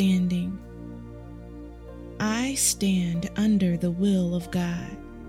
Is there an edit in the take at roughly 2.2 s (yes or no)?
no